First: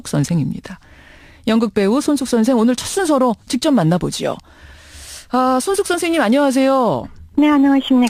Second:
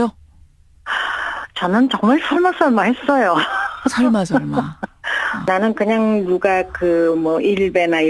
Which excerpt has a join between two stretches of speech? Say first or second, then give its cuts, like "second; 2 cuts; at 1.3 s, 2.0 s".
second; 1 cut; at 5.1 s